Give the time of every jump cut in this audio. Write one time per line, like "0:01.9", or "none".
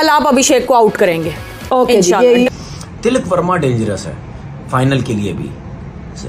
0:02.5